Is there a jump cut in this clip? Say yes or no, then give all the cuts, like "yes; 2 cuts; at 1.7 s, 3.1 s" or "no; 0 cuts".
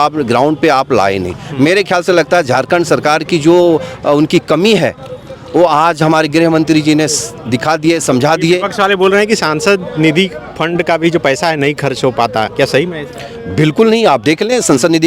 no; 0 cuts